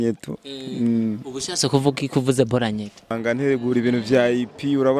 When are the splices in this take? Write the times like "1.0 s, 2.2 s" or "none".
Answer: 3.2 s